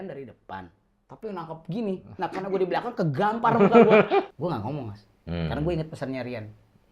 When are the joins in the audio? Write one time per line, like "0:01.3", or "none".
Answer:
0:04.3